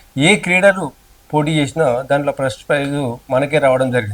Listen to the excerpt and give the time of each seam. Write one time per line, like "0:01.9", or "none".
none